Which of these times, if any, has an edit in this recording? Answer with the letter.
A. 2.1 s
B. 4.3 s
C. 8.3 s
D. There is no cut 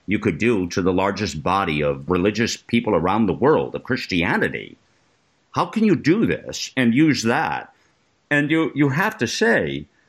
A